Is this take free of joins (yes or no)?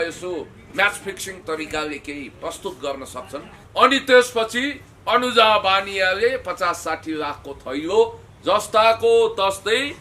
no